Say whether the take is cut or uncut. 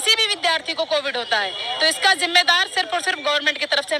uncut